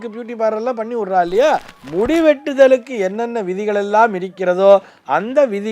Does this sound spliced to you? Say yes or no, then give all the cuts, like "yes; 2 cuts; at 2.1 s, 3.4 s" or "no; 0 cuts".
yes; 1 cut; at 1.8 s